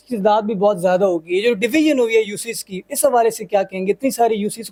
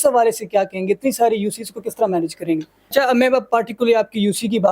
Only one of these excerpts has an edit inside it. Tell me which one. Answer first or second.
second